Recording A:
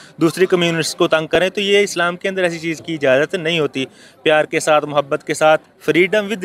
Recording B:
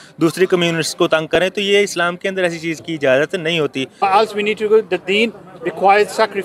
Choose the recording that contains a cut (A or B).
B